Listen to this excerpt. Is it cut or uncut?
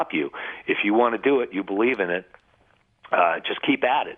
uncut